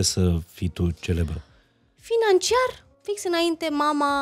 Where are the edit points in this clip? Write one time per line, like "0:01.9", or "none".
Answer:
0:02.9